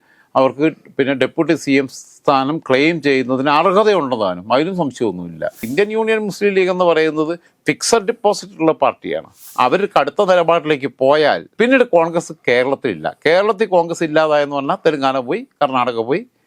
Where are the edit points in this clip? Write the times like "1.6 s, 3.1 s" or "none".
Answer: 5.7 s, 9.4 s